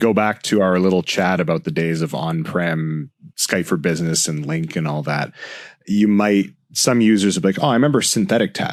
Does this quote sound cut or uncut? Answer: uncut